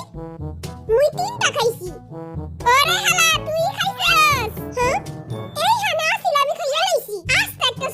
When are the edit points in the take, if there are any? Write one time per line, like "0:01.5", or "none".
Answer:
none